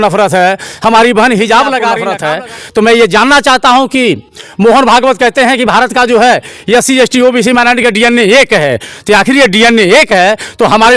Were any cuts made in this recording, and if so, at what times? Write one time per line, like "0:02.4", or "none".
0:02.0